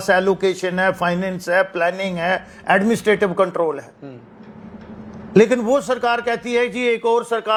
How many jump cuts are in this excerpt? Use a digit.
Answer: 0